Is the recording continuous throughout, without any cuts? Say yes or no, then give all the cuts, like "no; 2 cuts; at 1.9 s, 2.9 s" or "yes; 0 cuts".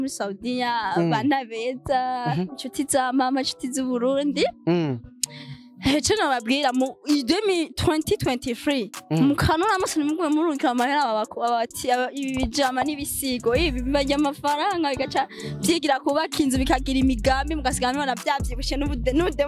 yes; 0 cuts